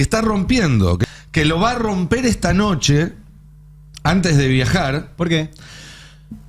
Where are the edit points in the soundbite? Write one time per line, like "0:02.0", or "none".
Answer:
0:01.0